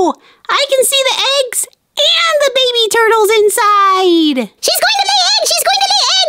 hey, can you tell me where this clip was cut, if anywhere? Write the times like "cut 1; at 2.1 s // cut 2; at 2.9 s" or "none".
cut 1; at 4.5 s